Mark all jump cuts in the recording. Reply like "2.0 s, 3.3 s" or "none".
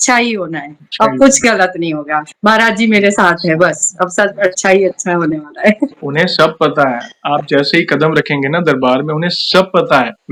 none